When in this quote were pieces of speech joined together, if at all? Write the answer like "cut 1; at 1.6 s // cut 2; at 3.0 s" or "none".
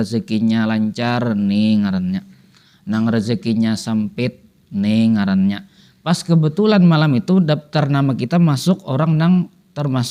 none